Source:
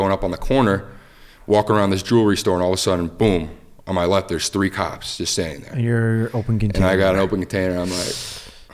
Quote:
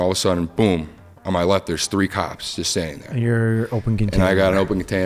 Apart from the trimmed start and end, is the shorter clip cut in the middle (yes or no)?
no